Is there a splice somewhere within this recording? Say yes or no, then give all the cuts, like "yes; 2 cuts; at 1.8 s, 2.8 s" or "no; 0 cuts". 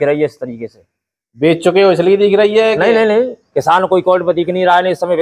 yes; 1 cut; at 3.4 s